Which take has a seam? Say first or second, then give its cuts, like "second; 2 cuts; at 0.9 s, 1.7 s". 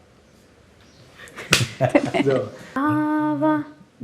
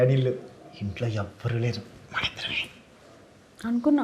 first; 1 cut; at 2.8 s